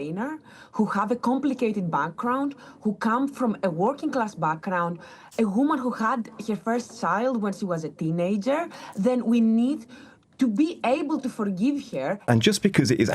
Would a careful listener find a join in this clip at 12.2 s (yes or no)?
yes